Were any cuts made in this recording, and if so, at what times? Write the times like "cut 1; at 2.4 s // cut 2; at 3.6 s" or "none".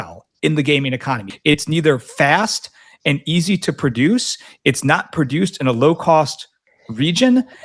cut 1; at 1.2 s

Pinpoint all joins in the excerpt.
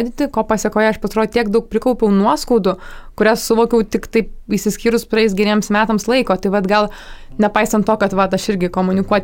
none

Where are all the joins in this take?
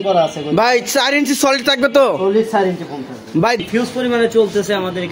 cut 1; at 3.6 s

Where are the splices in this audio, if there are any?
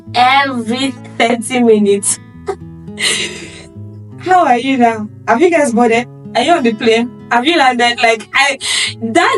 cut 1; at 0.9 s

